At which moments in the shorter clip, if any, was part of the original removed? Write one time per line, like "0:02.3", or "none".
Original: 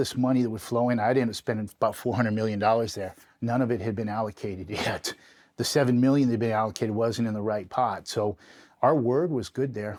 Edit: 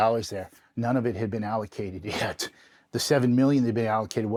none